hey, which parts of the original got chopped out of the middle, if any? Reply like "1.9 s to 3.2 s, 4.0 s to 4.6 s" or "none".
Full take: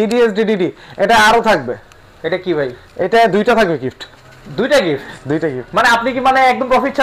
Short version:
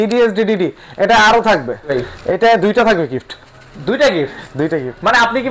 1.9 s to 2.6 s